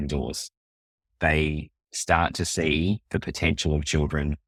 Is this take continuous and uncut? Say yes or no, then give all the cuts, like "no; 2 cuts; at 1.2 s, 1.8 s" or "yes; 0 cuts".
yes; 0 cuts